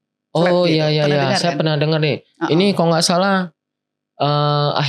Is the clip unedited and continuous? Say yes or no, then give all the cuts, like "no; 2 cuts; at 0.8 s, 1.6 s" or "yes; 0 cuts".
yes; 0 cuts